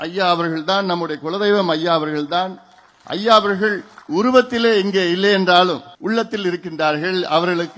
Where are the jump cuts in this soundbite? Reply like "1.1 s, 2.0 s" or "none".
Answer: 3.9 s, 5.9 s